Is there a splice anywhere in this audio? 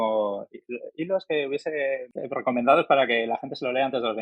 yes; 1 cut; at 2.1 s

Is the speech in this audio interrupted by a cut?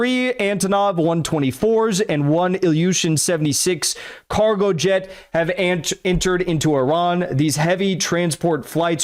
no; 0 cuts

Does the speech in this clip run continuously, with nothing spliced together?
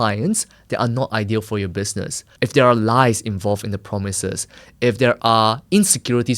no; 1 cut; at 2.3 s

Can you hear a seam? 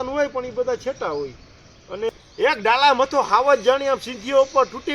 yes; 1 cut; at 2.1 s

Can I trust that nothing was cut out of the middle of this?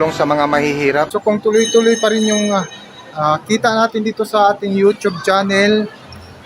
no; 1 cut; at 1.1 s

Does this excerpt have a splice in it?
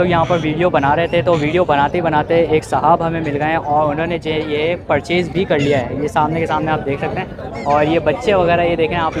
no; 0 cuts

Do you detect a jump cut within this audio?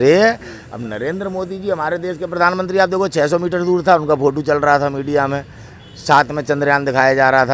no; 0 cuts

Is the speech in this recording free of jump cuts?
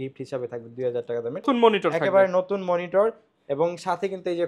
no; 1 cut; at 1.4 s

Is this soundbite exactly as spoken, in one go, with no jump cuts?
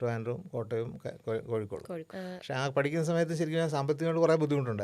no; 1 cut; at 2.1 s

